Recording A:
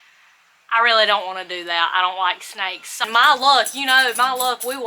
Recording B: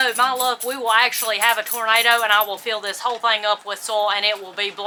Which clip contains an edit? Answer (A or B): A